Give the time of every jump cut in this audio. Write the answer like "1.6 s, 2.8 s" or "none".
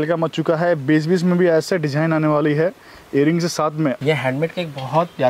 4.0 s